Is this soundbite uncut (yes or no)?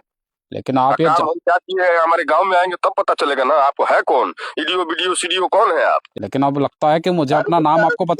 no